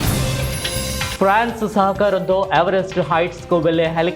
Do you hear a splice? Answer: yes; 1 cut; at 1.1 s

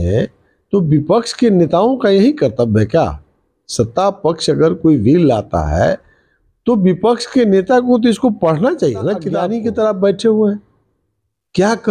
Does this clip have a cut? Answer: yes; 1 cut; at 9.4 s

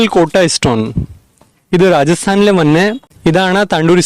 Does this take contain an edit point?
yes; 1 cut; at 3.0 s

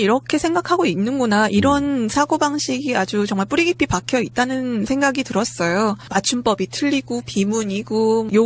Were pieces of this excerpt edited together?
yes; 1 cut; at 6.7 s

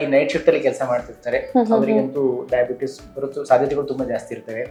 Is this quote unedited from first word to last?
yes; 0 cuts

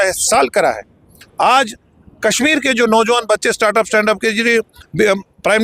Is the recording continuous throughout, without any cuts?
yes; 0 cuts

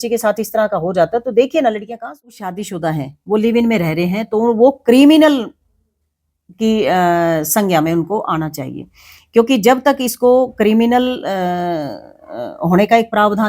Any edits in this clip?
yes; 1 cut; at 2.6 s

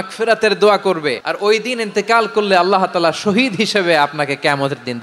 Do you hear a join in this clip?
yes; 1 cut; at 1.3 s

